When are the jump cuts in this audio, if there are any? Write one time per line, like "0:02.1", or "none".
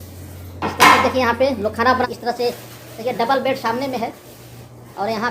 0:02.1